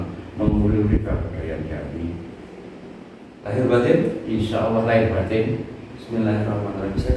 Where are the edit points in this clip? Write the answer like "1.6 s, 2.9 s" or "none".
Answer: 3.3 s